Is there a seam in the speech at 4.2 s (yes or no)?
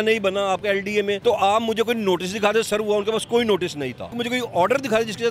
yes